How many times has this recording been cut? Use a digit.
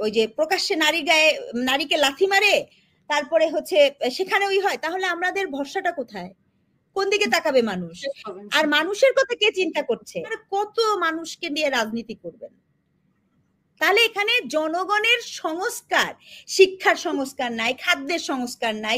1